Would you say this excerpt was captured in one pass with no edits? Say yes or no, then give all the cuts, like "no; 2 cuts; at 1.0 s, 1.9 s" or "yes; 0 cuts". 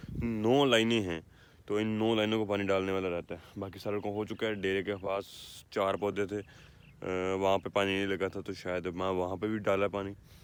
yes; 0 cuts